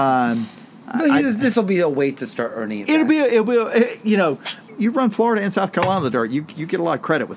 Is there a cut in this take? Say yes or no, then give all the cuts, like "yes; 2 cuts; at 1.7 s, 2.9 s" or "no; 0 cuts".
yes; 1 cut; at 4.5 s